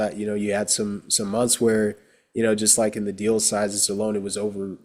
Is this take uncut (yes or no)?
yes